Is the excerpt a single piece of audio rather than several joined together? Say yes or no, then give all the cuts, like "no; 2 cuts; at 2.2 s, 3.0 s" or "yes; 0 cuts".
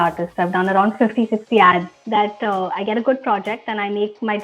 no; 1 cut; at 1.9 s